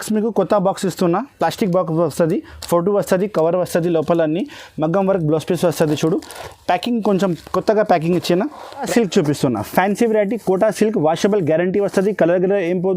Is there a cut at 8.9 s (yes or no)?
yes